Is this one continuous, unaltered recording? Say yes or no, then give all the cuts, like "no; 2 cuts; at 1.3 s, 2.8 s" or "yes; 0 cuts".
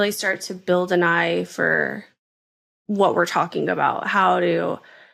yes; 0 cuts